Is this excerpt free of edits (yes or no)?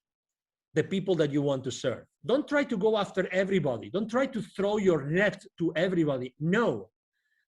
no